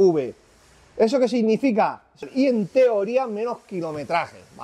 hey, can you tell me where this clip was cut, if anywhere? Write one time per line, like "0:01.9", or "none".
0:02.3